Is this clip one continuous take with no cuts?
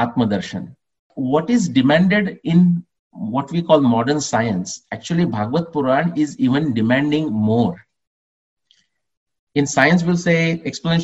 no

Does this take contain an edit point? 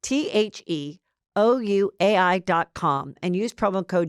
yes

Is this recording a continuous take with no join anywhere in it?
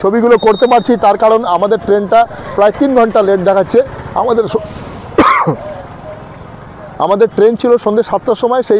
yes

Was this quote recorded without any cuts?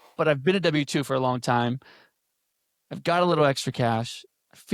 yes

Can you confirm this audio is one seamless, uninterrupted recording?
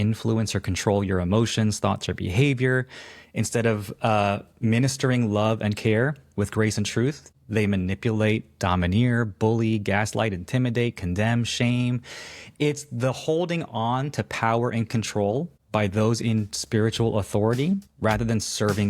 no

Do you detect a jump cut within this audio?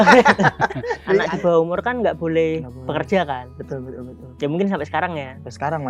yes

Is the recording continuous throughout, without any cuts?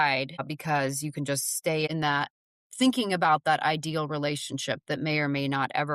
no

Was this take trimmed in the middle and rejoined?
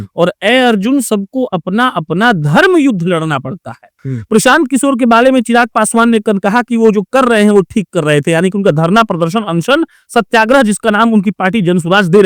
yes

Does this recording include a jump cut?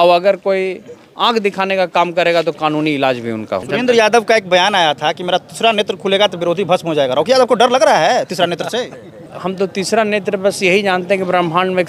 yes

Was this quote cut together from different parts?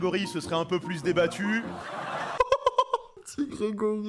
yes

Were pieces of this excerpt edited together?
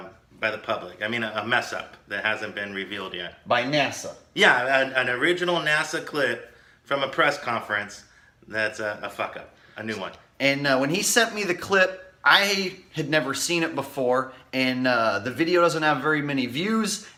no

